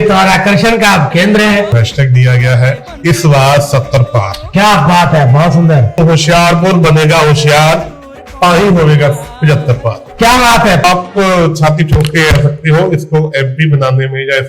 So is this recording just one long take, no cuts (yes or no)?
no